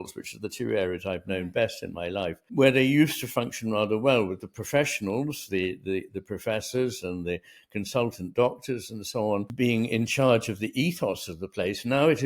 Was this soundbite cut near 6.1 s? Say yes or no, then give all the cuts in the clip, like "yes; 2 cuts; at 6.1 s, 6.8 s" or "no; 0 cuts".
no; 2 cuts; at 2.5 s, 9.5 s